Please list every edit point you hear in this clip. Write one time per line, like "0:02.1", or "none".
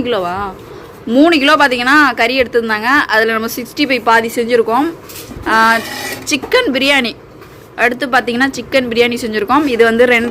none